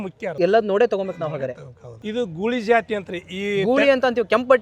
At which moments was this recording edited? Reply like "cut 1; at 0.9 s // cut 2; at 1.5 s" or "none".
cut 1; at 1.9 s